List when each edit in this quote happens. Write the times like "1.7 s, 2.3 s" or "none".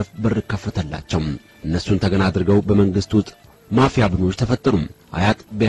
none